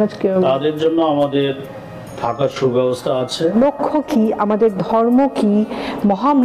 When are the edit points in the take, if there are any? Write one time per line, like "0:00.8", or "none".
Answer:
0:03.5